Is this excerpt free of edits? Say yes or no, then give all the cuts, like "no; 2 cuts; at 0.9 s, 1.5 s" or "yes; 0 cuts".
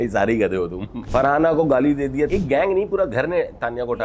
no; 2 cuts; at 0.9 s, 2.3 s